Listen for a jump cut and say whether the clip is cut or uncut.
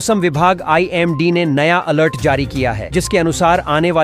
uncut